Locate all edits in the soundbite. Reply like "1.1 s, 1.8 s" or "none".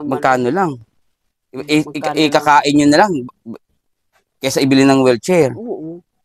none